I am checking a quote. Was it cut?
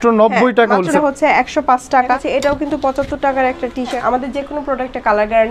yes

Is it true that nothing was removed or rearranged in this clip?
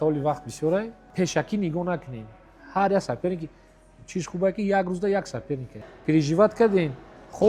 no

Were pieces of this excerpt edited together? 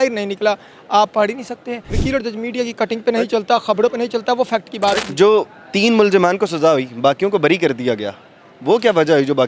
yes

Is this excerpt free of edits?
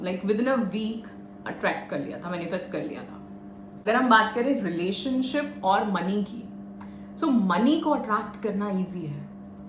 no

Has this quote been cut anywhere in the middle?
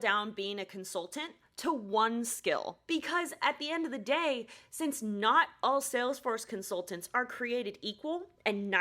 yes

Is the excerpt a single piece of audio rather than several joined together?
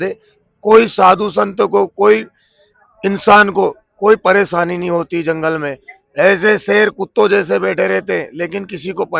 yes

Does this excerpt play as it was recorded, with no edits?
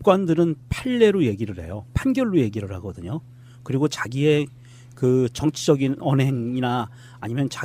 yes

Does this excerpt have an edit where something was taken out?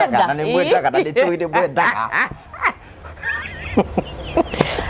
yes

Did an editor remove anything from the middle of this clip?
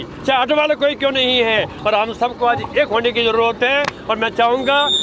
no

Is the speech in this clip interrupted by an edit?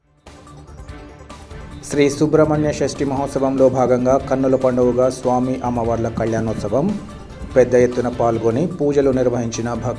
yes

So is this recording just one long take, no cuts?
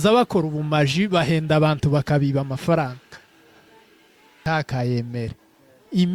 no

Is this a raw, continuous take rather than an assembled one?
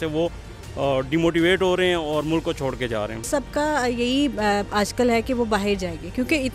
no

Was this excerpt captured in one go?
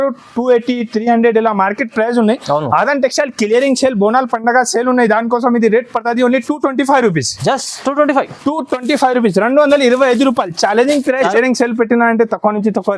no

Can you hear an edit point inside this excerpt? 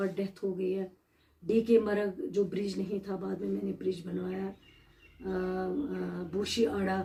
no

